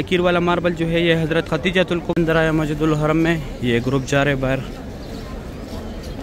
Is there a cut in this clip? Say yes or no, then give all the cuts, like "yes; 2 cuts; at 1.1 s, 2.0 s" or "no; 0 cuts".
yes; 1 cut; at 2.1 s